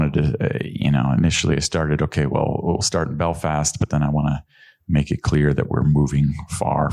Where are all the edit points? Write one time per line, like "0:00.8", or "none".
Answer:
none